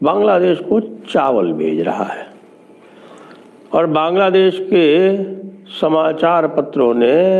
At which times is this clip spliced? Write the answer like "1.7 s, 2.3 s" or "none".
none